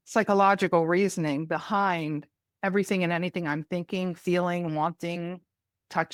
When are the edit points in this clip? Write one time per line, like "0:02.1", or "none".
none